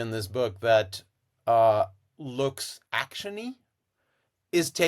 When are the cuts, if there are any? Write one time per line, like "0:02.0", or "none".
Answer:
none